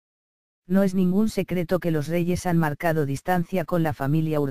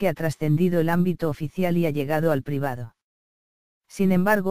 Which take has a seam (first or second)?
first